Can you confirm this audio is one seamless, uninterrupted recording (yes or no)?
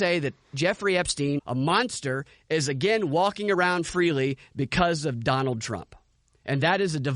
no